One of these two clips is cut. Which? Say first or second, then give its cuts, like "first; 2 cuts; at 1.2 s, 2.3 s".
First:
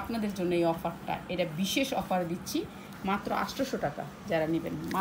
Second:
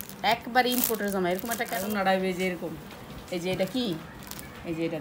second; 1 cut; at 1.8 s